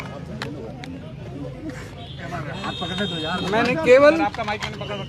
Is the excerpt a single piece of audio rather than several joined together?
yes; 0 cuts

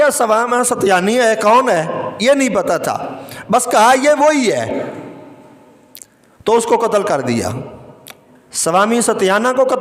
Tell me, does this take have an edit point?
no; 0 cuts

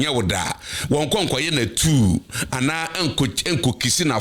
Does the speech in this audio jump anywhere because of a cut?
no; 0 cuts

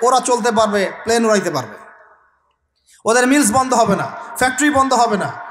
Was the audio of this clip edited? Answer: no; 0 cuts

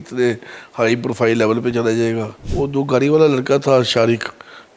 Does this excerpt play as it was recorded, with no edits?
no; 1 cut; at 2.4 s

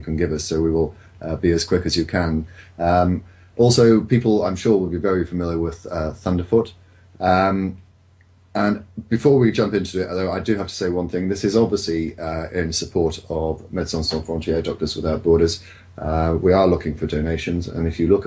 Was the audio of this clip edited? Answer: no; 0 cuts

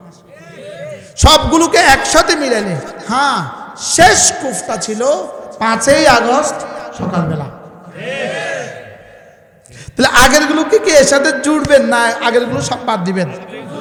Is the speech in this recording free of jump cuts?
yes; 0 cuts

